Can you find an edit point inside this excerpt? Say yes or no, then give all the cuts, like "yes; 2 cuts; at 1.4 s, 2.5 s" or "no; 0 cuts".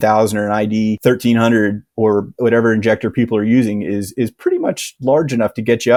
no; 0 cuts